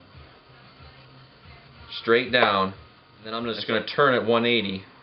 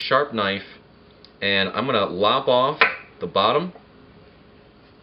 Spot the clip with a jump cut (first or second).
first